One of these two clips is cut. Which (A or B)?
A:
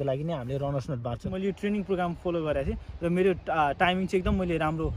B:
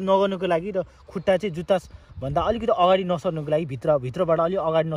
A